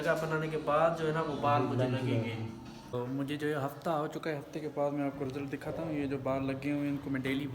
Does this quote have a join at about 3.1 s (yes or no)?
yes